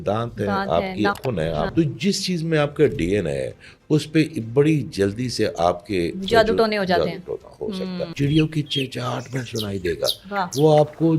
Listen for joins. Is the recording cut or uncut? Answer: cut